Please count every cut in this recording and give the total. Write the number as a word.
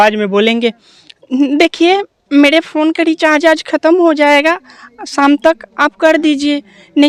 zero